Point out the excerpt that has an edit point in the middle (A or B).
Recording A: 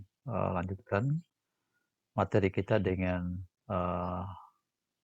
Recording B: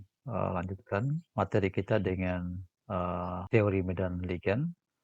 B